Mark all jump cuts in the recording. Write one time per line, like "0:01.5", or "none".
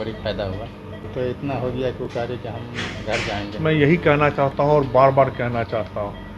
0:01.1
0:03.5